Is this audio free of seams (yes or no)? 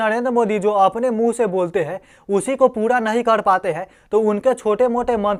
yes